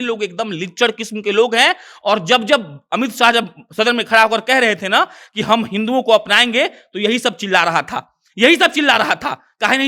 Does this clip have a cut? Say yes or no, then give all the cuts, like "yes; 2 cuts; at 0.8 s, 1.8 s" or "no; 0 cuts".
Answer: no; 0 cuts